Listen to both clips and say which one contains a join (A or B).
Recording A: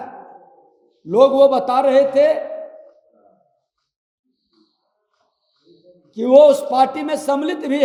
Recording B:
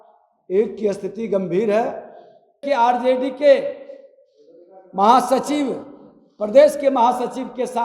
B